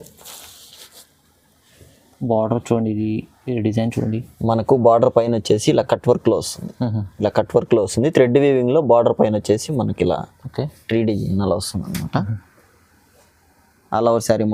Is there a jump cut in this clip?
no; 0 cuts

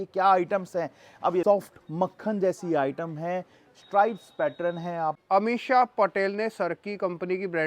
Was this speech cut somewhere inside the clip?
yes; 2 cuts; at 1.4 s, 5.2 s

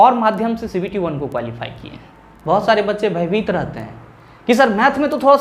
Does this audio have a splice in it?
yes; 1 cut; at 2.3 s

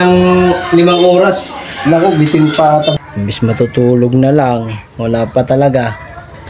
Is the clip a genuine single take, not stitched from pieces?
no; 1 cut; at 2.9 s

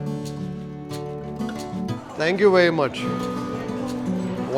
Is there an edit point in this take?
yes; 1 cut; at 1.9 s

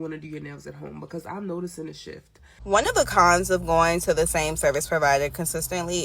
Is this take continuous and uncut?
no; 1 cut; at 2.5 s

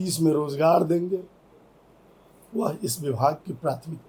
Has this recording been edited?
no; 0 cuts

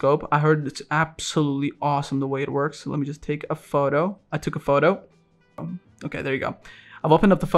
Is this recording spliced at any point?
yes; 1 cut; at 5.6 s

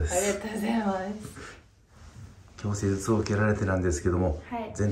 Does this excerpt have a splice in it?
no; 0 cuts

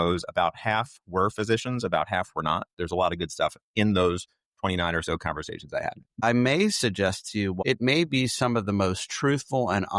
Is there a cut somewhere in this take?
yes; 3 cuts; at 2.8 s, 6.2 s, 7.6 s

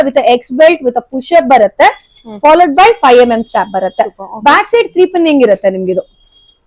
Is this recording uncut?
yes; 0 cuts

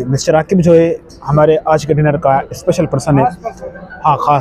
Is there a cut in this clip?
no; 0 cuts

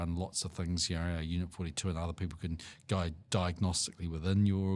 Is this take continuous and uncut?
yes; 0 cuts

